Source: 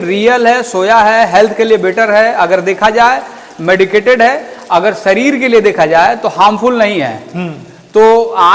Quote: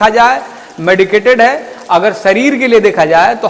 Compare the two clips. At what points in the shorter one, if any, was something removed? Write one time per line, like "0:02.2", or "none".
none